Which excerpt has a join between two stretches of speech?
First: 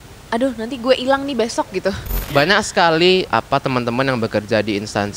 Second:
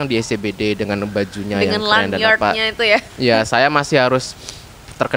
first; 2 cuts; at 2.1 s, 3.3 s

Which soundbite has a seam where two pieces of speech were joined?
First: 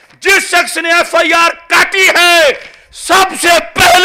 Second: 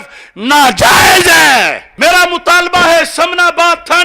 second; 1 cut; at 1.8 s

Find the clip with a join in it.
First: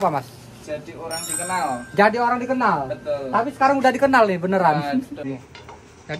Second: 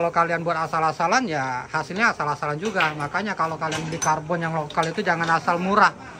first; 1 cut; at 5.1 s

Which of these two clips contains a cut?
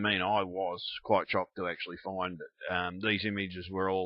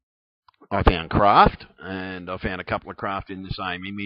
first; 1 cut; at 1.3 s

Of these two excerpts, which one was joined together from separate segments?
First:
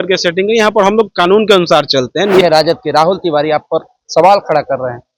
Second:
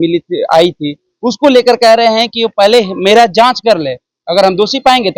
first; 1 cut; at 2.4 s

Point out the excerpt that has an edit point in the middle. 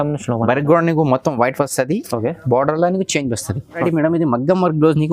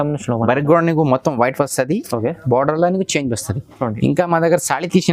first; 1 cut; at 3.7 s

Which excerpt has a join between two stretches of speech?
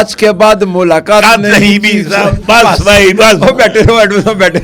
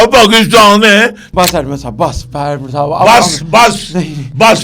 second; 1 cut; at 1.2 s

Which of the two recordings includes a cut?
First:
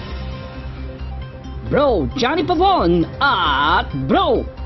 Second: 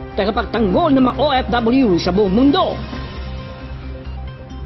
second; 1 cut; at 1.1 s

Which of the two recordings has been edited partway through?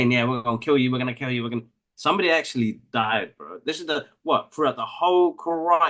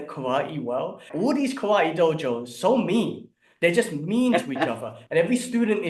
second; 1 cut; at 1.1 s

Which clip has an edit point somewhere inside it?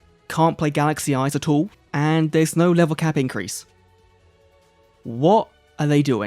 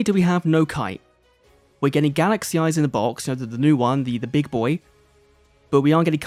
first; 1 cut; at 1.7 s

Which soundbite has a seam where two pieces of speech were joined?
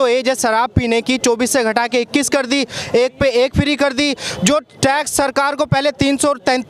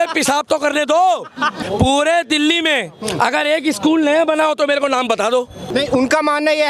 second; 2 cuts; at 1.6 s, 5.6 s

